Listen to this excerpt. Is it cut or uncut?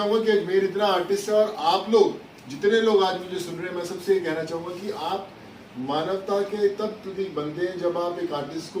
uncut